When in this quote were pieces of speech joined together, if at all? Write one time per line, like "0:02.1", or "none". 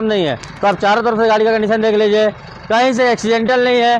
none